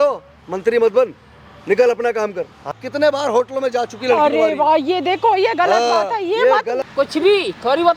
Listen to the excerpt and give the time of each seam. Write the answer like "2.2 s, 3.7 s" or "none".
2.7 s, 6.8 s

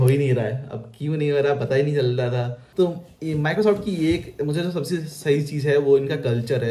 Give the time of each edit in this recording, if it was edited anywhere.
2.6 s

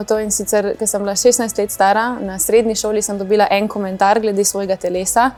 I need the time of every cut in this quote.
none

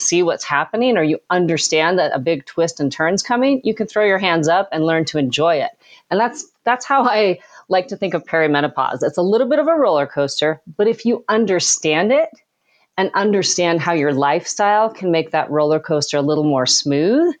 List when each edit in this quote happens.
none

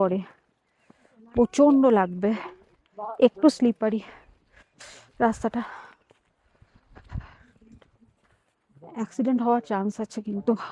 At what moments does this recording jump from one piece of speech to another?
none

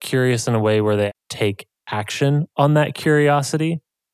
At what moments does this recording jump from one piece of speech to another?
1.1 s

